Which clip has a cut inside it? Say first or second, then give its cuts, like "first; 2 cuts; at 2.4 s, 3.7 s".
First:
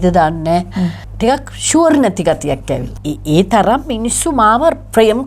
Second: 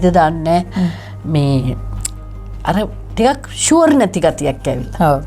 first; 2 cuts; at 1.0 s, 2.9 s